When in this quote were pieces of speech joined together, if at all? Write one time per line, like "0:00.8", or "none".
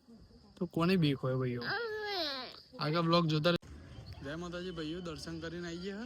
0:03.6